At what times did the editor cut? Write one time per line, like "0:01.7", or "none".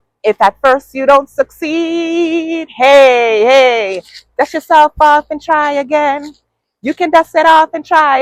none